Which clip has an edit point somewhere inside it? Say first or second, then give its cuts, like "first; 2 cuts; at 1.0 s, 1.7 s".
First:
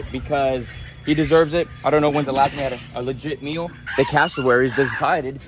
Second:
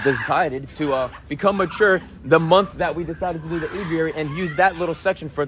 first; 1 cut; at 3.8 s